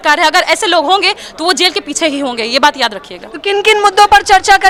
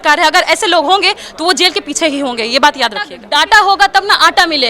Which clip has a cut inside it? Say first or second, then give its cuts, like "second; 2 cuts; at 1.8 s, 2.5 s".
second; 1 cut; at 3.2 s